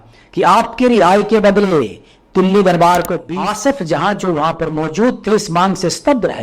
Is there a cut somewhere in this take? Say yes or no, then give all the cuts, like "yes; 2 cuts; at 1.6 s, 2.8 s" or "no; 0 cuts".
yes; 1 cut; at 3.2 s